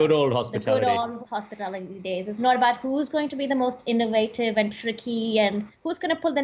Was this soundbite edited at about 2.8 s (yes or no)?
no